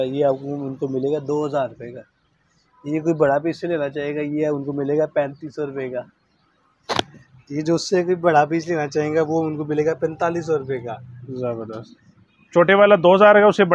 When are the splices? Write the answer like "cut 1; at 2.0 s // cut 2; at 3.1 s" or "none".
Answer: none